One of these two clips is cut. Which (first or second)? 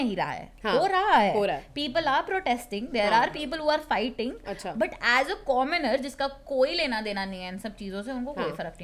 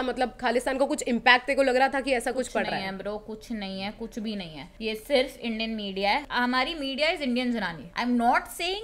second